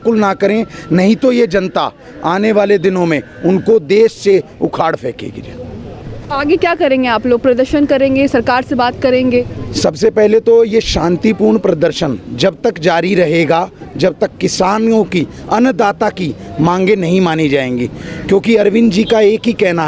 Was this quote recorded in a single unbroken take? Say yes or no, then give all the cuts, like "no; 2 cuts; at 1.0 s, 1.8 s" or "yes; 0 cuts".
yes; 0 cuts